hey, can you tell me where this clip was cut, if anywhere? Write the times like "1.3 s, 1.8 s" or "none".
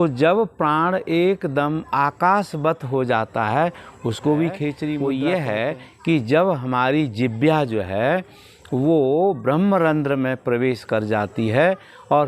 5.0 s